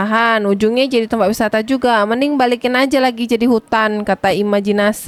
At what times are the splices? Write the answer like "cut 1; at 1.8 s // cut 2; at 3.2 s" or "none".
none